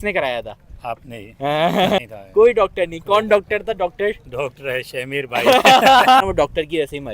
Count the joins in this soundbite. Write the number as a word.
two